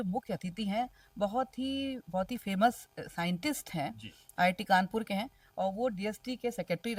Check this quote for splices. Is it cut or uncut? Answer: uncut